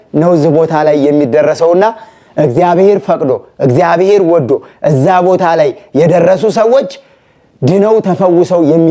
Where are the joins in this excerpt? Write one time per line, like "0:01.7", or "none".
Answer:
none